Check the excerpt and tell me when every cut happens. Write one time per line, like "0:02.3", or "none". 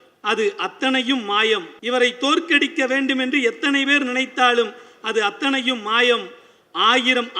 0:01.7